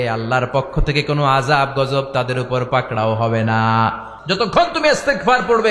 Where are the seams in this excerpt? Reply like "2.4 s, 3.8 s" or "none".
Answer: 4.1 s